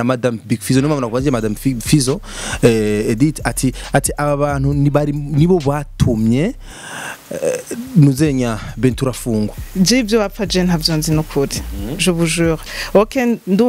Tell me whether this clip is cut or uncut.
cut